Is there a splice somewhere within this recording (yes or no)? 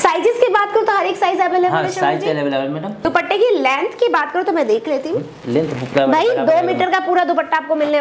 yes